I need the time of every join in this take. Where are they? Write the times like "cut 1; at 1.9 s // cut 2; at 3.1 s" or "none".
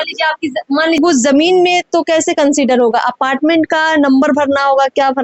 cut 1; at 1.0 s

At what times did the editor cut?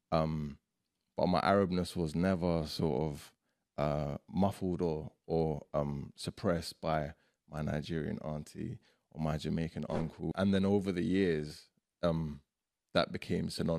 cut 1; at 10.3 s

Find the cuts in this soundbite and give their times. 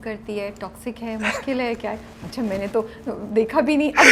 none

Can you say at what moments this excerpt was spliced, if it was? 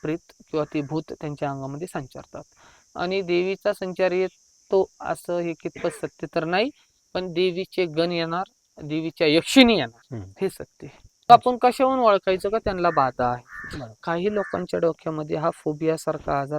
cut 1; at 11.3 s

